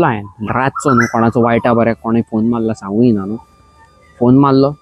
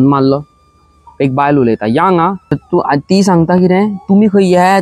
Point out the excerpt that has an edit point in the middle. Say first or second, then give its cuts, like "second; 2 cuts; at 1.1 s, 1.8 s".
second; 1 cut; at 2.5 s